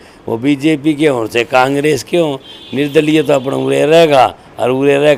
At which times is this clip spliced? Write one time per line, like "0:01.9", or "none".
none